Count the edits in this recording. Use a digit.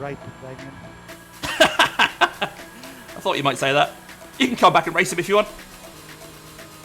1